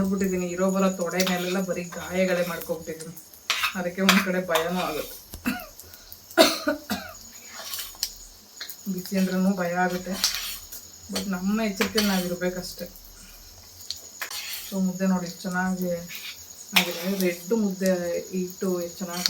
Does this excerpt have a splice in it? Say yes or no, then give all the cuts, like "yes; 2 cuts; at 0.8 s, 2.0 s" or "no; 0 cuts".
no; 0 cuts